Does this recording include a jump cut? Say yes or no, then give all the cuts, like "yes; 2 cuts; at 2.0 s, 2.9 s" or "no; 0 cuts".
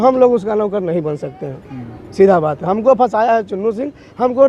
no; 0 cuts